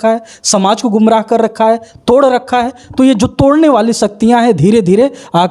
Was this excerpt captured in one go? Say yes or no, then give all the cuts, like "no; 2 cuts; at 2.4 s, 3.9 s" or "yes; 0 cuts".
yes; 0 cuts